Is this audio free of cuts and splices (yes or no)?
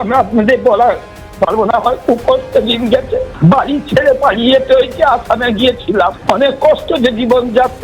no